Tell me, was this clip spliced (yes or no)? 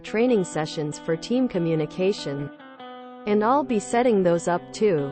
no